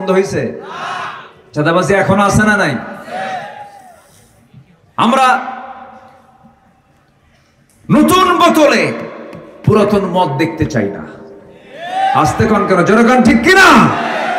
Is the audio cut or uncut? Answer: uncut